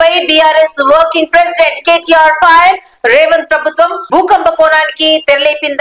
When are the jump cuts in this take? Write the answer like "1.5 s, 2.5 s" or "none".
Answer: none